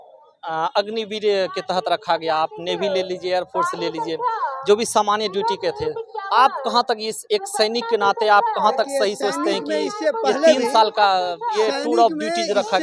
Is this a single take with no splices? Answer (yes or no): yes